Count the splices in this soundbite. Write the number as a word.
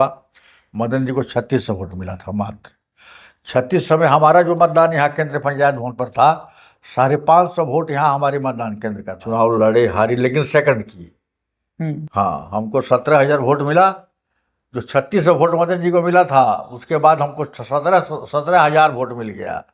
one